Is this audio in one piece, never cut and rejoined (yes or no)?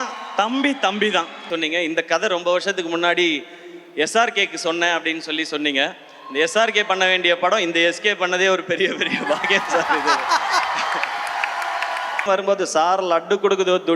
no